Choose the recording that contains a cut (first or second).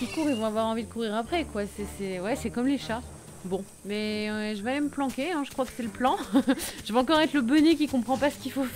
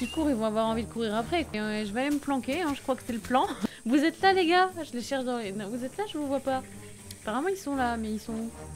second